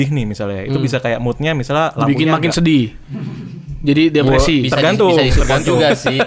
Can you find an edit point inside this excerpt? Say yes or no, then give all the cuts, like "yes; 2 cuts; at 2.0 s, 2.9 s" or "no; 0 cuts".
no; 0 cuts